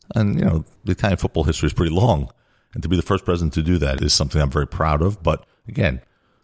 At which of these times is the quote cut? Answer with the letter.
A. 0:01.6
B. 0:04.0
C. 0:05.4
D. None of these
B